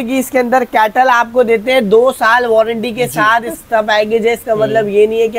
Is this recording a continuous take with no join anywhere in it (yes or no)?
no